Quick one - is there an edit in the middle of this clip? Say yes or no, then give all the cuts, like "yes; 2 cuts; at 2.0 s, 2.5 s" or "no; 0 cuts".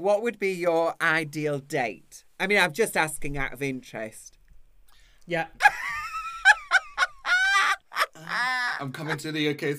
no; 0 cuts